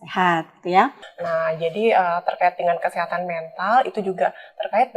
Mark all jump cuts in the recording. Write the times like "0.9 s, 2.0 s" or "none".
1.1 s

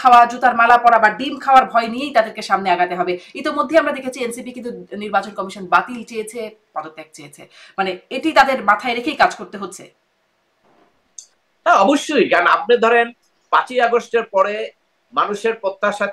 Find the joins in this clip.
none

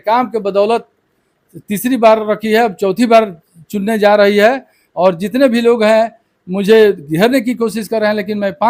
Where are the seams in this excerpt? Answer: none

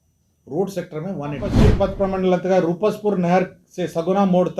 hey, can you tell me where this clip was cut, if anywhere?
1.5 s

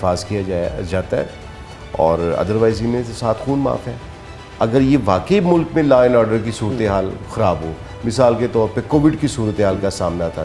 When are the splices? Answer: none

